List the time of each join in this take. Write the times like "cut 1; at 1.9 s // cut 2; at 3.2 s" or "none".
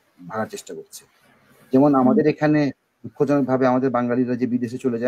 none